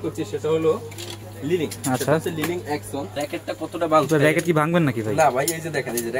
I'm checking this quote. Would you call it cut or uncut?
cut